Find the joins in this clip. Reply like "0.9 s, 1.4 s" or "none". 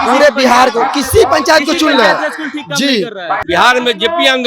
3.3 s